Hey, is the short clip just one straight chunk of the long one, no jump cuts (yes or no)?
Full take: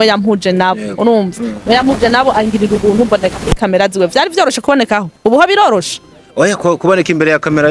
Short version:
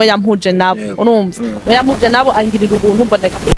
yes